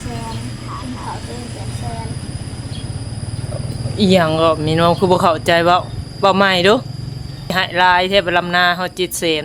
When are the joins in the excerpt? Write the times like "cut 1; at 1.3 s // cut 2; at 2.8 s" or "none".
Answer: cut 1; at 7.5 s